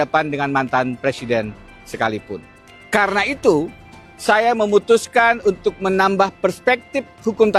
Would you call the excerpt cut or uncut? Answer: uncut